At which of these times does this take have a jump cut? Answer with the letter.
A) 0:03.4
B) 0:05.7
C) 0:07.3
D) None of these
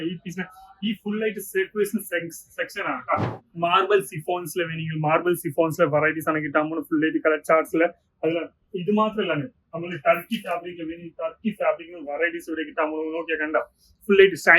A